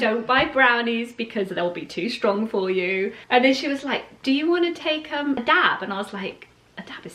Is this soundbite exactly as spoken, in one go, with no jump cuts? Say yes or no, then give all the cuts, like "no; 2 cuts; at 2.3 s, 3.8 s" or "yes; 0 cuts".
no; 1 cut; at 5.4 s